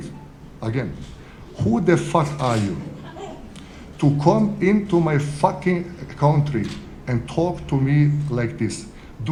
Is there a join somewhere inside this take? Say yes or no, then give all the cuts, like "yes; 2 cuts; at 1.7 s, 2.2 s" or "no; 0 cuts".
no; 0 cuts